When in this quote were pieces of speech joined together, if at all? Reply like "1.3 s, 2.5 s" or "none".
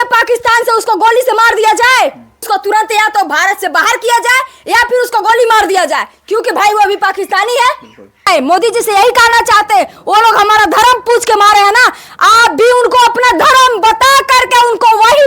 2.5 s, 8.3 s